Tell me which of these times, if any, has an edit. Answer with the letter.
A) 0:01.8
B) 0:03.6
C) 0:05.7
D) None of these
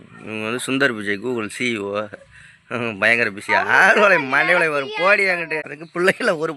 C